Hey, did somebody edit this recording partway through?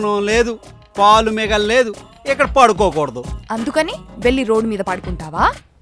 no; 0 cuts

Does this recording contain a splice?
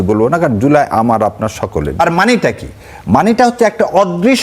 yes; 1 cut; at 2.0 s

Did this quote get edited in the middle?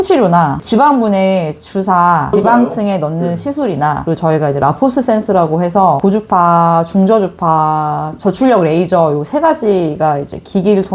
no; 0 cuts

